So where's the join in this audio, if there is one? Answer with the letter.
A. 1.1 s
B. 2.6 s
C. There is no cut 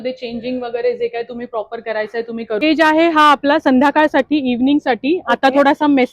B